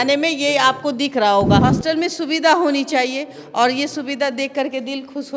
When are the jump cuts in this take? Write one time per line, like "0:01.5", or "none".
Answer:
0:01.6